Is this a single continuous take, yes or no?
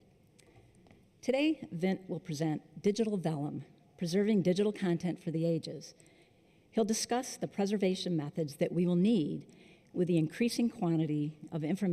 no